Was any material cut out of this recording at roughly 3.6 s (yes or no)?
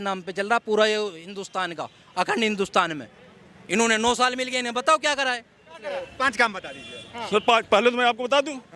no